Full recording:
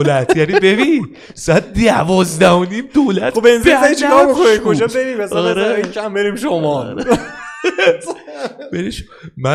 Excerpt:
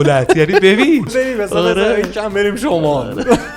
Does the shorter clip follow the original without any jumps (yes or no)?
no